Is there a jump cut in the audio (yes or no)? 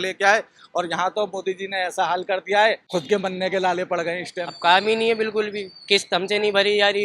yes